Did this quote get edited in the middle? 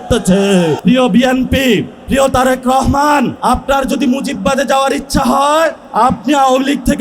yes; 4 cuts; at 0.8 s, 2.0 s, 3.4 s, 5.8 s

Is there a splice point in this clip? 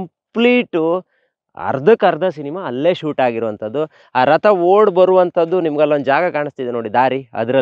no; 0 cuts

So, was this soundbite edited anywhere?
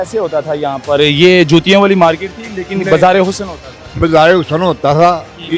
no; 0 cuts

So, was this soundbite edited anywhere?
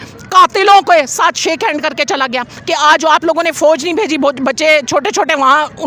no; 0 cuts

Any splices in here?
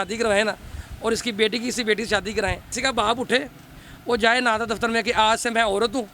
yes; 1 cut; at 2.7 s

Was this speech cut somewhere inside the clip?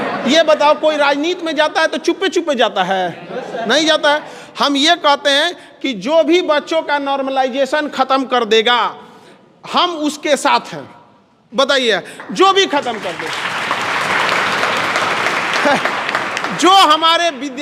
no; 0 cuts

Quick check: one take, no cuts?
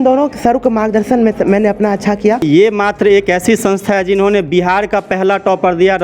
no; 1 cut; at 2.4 s

